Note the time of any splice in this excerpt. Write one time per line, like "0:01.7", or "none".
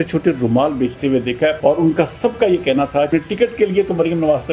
0:01.6
0:03.1

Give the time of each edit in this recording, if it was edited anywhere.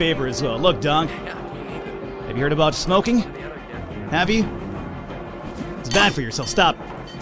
none

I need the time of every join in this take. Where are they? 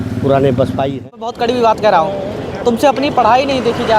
0:01.3

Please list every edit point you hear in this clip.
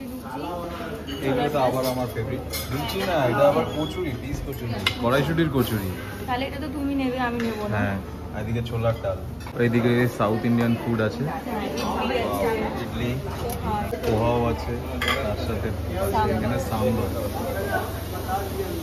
none

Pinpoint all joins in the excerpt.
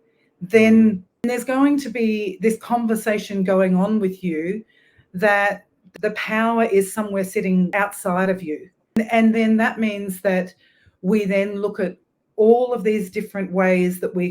0:01.2
0:05.9
0:07.7
0:09.0

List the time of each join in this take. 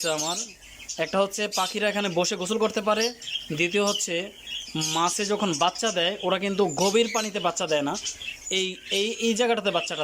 none

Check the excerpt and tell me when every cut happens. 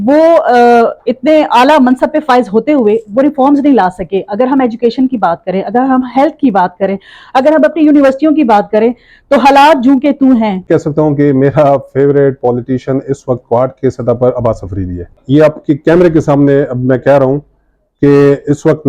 0:10.7
0:15.2

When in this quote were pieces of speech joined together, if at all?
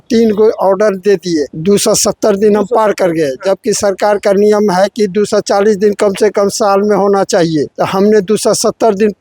0:01.5
0:07.7

